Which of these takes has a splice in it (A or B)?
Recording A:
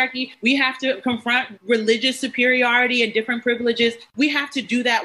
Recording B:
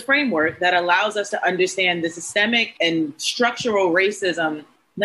A